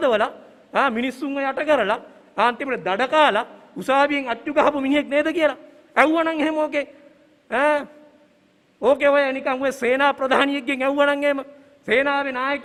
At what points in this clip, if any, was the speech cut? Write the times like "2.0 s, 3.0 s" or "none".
none

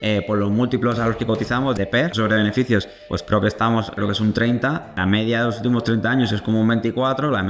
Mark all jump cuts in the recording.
1.8 s, 3.1 s, 4.0 s, 5.0 s

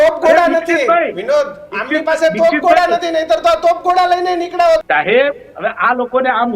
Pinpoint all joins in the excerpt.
4.8 s

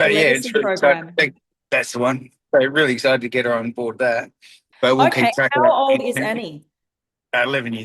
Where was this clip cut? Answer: 4.5 s

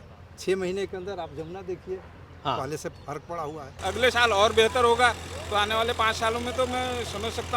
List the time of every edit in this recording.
3.7 s

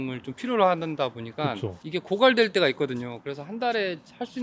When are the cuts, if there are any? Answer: none

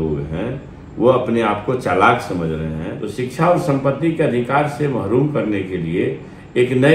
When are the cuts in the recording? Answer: 3.0 s

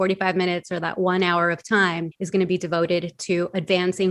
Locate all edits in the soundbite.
2.1 s

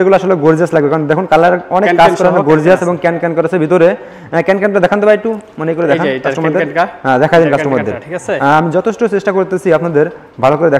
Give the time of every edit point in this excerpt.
none

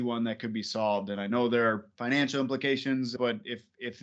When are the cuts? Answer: 1.9 s, 3.1 s

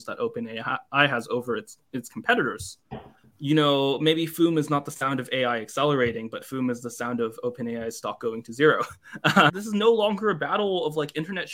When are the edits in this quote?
9.5 s

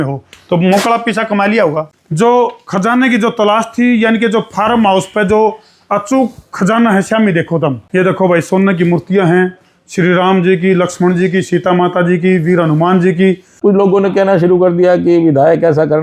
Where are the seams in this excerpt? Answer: 1.9 s, 7.8 s, 13.5 s

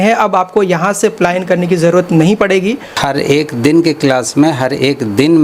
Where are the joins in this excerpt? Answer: 3.0 s

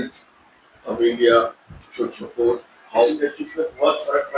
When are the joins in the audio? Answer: 3.1 s

